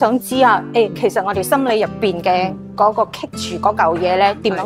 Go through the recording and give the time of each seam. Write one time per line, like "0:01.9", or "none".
none